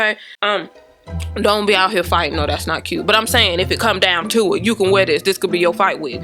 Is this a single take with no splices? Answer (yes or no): yes